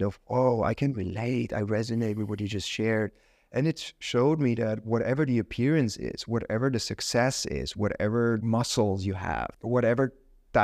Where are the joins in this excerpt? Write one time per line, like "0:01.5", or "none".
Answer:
0:08.4
0:09.5